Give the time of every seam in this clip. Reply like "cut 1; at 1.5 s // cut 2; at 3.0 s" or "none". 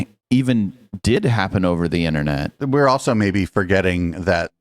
cut 1; at 2.6 s